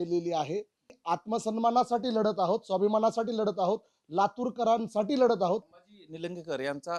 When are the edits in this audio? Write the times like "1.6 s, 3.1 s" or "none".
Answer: 1.0 s, 5.8 s